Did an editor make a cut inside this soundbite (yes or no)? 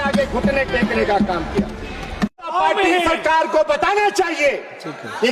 yes